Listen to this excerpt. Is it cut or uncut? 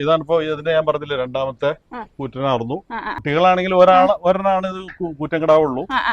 cut